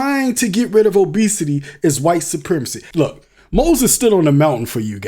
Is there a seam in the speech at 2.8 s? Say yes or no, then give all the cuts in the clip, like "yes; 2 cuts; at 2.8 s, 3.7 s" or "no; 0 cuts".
yes; 1 cut; at 2.8 s